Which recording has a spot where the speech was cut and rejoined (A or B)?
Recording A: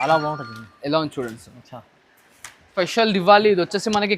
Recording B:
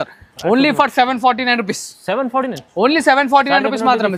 A